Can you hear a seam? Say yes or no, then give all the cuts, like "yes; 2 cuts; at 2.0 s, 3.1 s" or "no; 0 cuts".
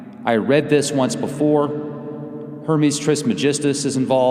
yes; 1 cut; at 2.8 s